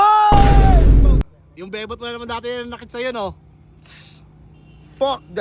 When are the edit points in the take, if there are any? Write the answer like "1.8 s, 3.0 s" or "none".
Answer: 1.2 s